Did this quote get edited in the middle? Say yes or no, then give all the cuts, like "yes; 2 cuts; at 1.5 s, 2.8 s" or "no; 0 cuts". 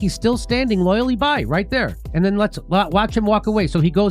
yes; 1 cut; at 2.0 s